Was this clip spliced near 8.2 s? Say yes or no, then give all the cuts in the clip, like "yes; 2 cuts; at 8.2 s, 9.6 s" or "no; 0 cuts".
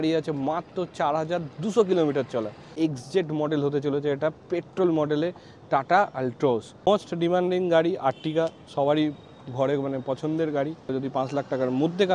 no; 3 cuts; at 2.7 s, 6.7 s, 10.9 s